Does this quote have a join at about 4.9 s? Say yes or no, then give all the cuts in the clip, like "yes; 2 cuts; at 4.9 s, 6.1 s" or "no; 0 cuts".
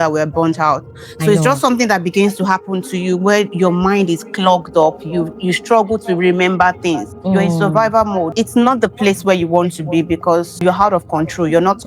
no; 3 cuts; at 7.1 s, 8.3 s, 10.6 s